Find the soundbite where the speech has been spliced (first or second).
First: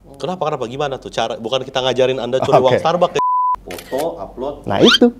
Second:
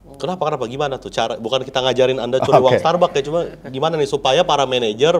first